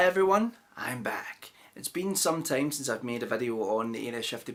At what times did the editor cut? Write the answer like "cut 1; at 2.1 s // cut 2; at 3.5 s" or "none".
none